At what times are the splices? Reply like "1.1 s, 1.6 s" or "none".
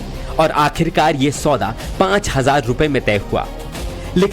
1.8 s